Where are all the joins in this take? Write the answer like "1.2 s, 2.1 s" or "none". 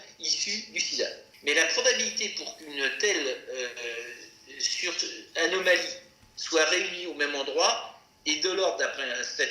1.3 s